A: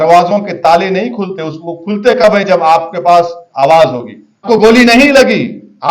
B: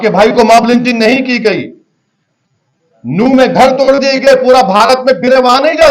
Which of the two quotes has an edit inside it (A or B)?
A